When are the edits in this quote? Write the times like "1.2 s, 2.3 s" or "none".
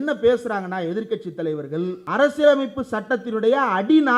2.0 s

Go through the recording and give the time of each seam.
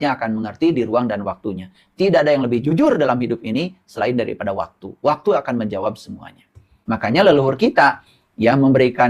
6.7 s

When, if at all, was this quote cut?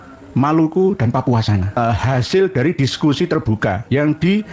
1.8 s

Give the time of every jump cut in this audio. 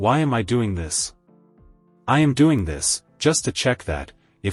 none

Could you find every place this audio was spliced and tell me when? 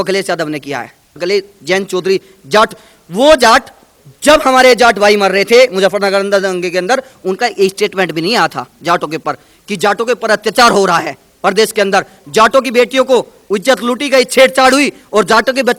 1.1 s

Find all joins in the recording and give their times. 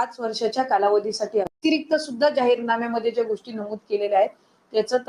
1.5 s

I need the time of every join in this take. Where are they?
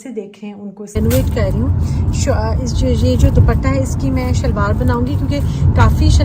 1.0 s

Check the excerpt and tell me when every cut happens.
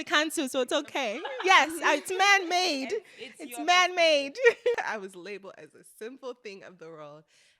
4.7 s

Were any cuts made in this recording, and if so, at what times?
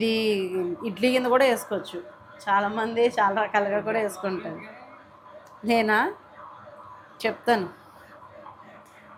none

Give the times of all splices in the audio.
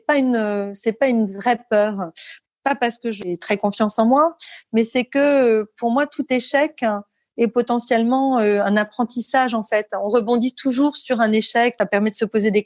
2.3 s, 3.3 s, 11.7 s

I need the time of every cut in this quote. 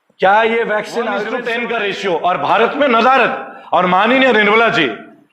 1.3 s

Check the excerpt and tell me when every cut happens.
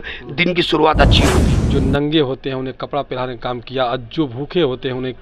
1.5 s

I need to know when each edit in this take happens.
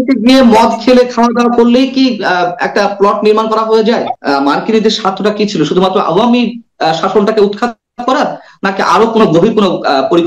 4.1 s

